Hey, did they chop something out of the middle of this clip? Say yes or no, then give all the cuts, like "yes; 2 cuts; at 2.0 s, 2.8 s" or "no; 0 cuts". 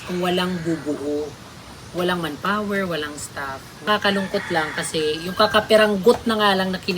yes; 1 cut; at 3.9 s